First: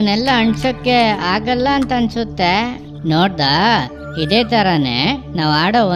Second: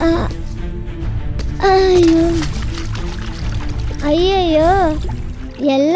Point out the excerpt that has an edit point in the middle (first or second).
first